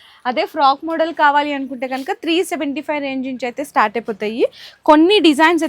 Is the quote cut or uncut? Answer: uncut